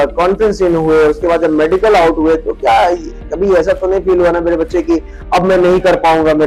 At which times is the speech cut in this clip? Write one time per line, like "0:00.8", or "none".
none